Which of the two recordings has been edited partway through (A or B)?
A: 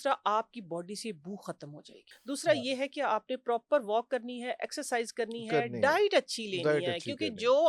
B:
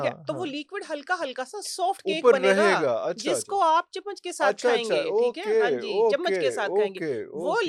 A